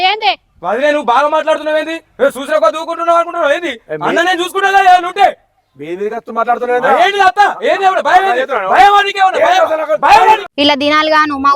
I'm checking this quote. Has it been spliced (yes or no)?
yes